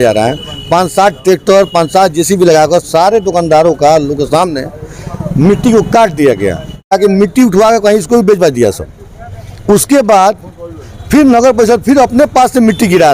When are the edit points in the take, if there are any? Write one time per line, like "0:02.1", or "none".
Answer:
0:07.0